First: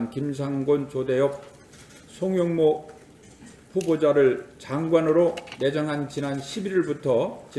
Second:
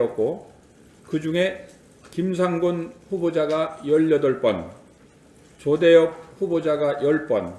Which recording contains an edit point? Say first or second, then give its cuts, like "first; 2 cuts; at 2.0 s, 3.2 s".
second; 1 cut; at 3.8 s